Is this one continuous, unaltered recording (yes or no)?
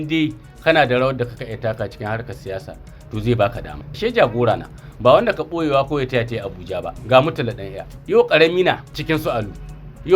no